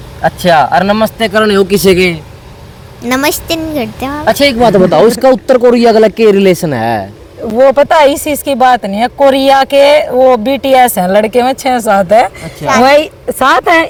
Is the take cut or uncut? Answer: uncut